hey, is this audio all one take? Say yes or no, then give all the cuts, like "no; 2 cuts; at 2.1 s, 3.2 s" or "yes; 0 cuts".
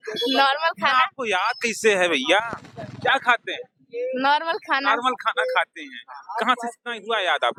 yes; 0 cuts